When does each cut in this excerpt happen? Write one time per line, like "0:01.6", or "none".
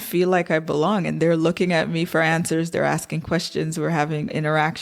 none